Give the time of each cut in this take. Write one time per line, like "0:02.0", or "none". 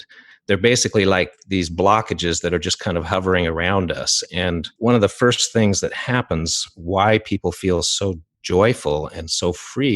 0:04.7